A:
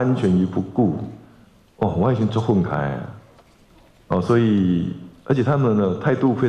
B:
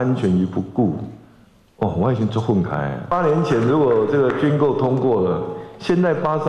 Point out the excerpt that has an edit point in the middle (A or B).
B